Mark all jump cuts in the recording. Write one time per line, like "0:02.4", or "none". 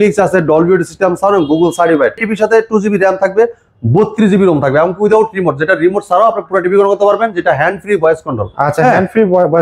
0:02.3